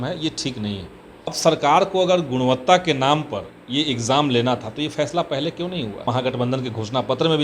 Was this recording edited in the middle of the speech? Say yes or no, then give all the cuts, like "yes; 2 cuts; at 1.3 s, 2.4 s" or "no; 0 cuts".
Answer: yes; 2 cuts; at 1.4 s, 6.1 s